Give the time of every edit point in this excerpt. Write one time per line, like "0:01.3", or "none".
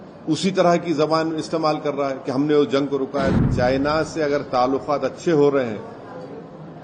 0:03.4